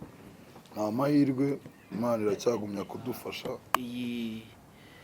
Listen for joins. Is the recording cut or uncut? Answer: cut